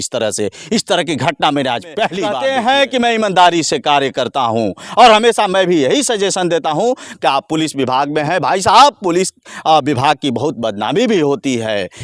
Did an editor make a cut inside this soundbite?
yes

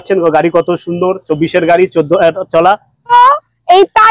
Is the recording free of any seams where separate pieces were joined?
no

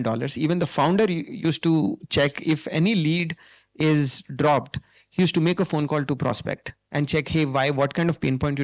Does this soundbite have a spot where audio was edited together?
no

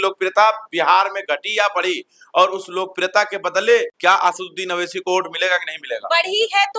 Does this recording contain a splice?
no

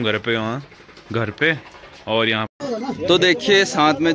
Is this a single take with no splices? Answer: no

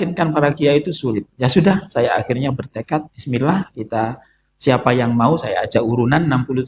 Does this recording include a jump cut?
no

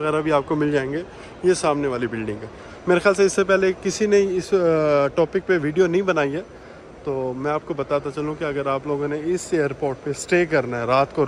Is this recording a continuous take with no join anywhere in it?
yes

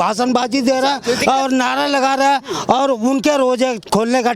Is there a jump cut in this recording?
no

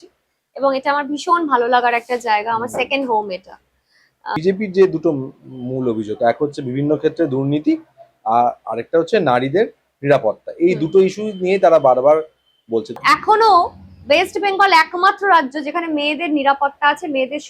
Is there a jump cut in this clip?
yes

